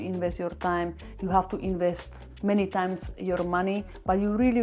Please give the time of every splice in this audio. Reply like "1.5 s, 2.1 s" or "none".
none